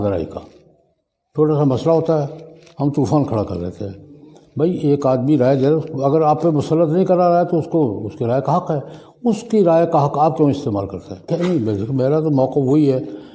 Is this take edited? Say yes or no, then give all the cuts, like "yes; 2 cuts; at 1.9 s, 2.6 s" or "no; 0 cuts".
yes; 1 cut; at 11.3 s